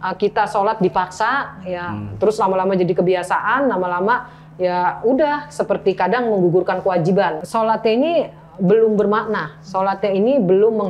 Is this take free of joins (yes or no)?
no